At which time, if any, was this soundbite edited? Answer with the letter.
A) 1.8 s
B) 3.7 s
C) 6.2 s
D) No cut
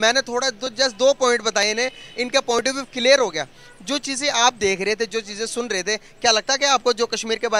D